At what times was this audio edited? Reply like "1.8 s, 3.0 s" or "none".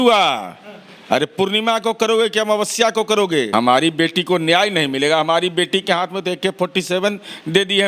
3.5 s